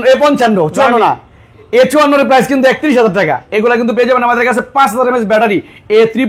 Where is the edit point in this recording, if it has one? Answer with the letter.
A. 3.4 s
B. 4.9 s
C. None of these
A